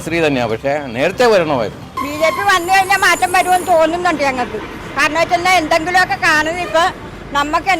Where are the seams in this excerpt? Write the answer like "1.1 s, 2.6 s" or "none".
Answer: 1.9 s